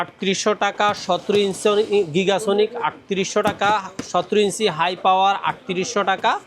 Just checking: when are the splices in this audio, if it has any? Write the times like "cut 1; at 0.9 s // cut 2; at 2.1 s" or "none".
none